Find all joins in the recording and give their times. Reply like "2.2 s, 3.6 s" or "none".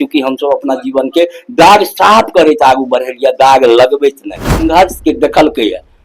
4.7 s

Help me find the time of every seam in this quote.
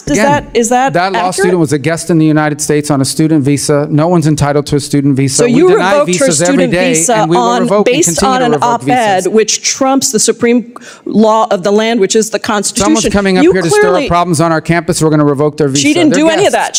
none

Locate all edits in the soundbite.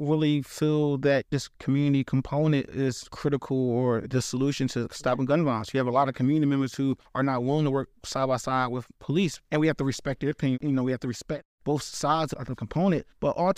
1.3 s, 2.9 s, 4.4 s, 10.6 s

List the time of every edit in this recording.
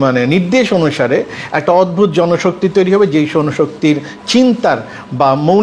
none

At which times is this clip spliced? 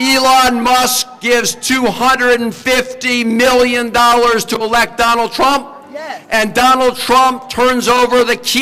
none

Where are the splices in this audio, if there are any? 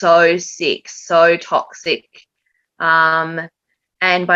none

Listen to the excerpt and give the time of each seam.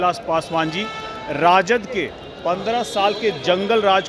none

